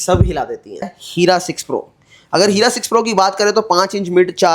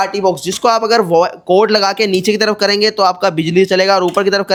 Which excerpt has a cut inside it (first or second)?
first